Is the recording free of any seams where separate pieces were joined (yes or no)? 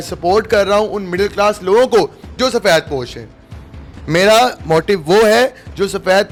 yes